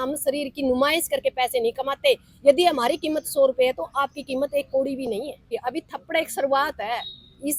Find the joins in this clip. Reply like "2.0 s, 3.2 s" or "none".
5.5 s